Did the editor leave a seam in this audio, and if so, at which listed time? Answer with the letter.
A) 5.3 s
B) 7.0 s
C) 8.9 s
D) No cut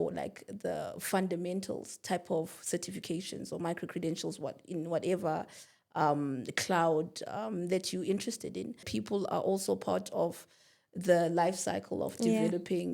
C